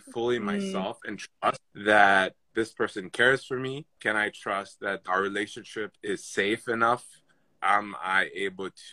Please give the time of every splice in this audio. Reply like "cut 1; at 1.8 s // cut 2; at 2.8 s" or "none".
cut 1; at 1.7 s // cut 2; at 2.4 s // cut 3; at 4.0 s // cut 4; at 5.0 s // cut 5; at 7.4 s